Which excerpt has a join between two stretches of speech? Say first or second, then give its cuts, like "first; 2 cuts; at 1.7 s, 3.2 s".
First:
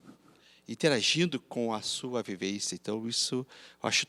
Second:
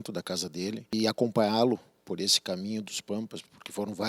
second; 1 cut; at 0.9 s